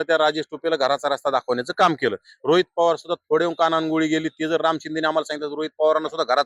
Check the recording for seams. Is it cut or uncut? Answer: uncut